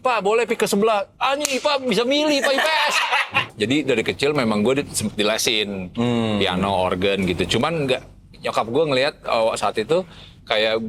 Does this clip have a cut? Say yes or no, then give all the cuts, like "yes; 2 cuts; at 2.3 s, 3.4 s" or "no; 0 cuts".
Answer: yes; 1 cut; at 3.4 s